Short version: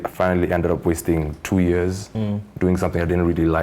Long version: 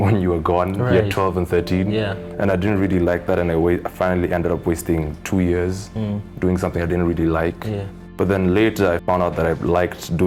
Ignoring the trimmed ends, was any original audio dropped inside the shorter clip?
no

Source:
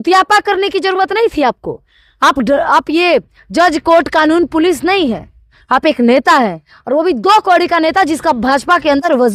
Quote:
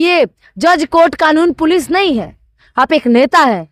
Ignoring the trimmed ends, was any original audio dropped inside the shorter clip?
no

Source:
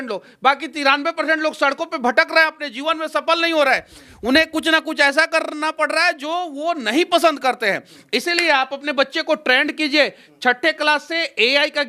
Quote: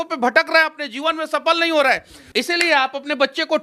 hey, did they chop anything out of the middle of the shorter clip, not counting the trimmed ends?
yes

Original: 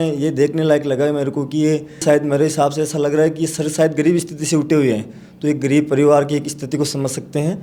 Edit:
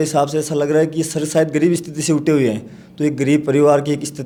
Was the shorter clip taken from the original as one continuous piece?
yes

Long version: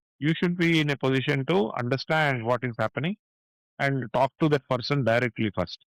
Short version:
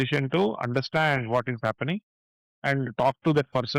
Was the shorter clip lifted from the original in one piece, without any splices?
yes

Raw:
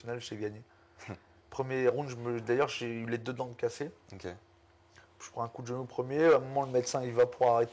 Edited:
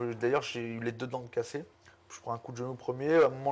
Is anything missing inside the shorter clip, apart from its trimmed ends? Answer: yes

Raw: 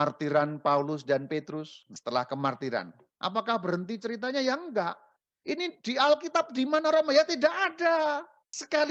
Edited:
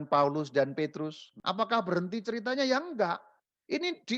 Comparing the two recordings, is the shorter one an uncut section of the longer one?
no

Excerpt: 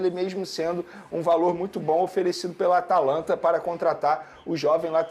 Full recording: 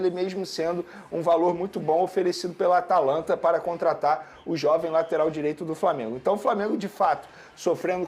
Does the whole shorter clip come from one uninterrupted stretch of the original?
yes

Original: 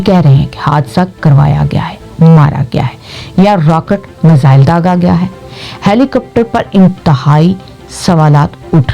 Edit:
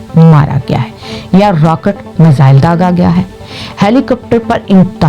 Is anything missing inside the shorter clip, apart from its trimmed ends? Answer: no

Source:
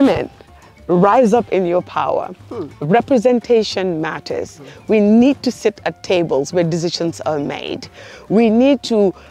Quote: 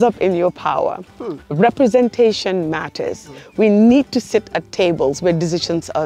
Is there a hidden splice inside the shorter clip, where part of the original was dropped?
no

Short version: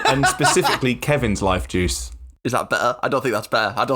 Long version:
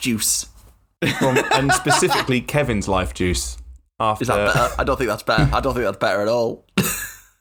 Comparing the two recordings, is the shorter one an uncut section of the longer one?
no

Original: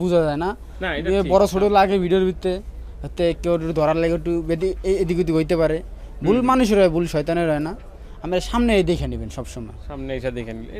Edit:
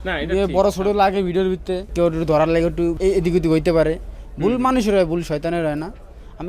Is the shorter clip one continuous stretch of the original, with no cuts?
no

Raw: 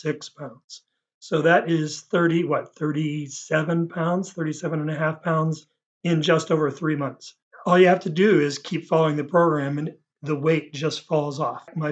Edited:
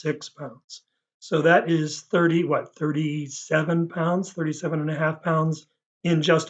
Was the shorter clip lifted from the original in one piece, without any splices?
yes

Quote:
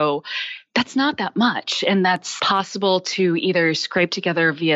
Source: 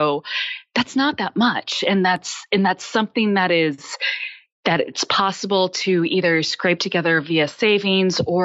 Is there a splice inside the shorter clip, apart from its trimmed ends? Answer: yes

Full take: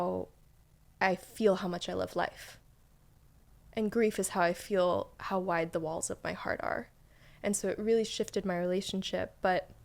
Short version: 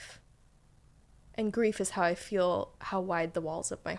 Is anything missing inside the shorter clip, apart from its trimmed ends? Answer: no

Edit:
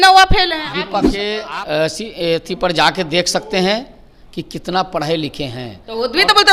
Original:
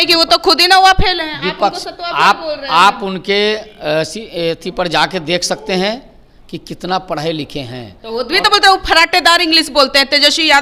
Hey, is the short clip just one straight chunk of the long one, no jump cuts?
no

